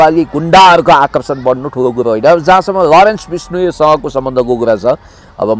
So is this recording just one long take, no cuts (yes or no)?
yes